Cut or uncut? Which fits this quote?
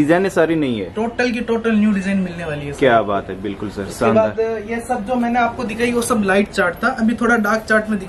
uncut